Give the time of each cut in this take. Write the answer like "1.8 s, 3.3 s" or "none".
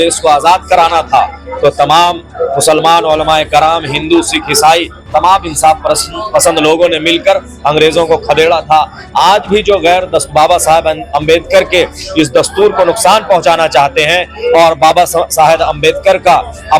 none